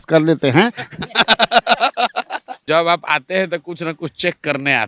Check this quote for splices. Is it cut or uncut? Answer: cut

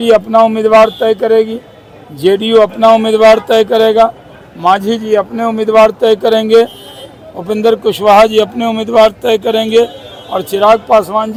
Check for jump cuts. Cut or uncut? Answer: uncut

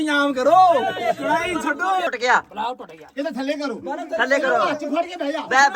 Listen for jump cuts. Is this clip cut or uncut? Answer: cut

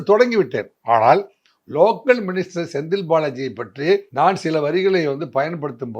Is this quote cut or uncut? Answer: cut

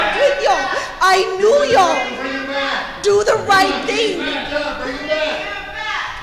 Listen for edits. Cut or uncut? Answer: uncut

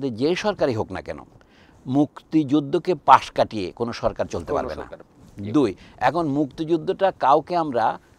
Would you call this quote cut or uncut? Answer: uncut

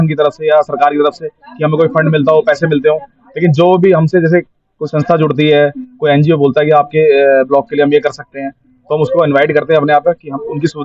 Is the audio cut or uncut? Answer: uncut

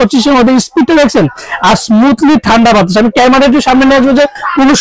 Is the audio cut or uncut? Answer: uncut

